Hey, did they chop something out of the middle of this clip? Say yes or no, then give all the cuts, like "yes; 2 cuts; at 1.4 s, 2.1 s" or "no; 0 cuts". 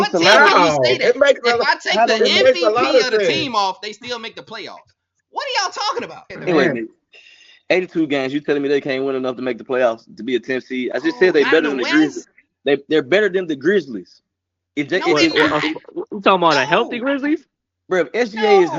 yes; 1 cut; at 6.3 s